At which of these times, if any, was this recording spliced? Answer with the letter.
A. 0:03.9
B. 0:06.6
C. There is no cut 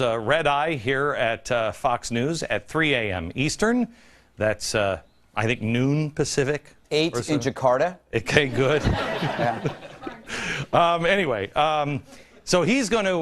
A